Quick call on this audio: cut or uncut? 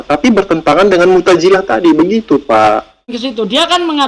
cut